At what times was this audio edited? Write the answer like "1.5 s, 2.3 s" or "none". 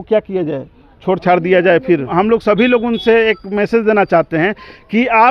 2.1 s

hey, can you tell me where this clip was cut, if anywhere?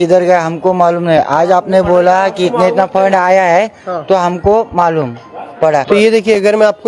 5.8 s

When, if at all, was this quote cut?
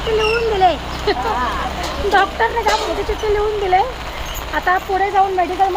none

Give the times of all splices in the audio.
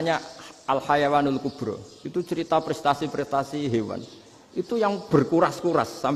none

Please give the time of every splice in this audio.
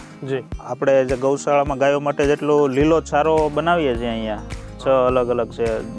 none

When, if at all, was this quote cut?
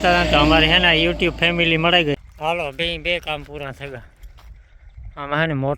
2.2 s

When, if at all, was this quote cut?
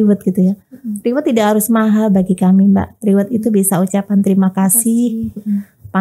none

